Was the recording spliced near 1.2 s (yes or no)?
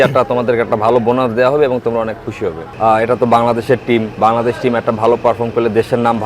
no